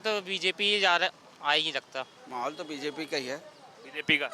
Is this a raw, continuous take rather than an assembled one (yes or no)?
no